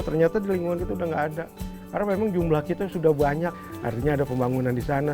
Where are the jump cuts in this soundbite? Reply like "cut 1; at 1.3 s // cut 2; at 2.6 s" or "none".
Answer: cut 1; at 3.7 s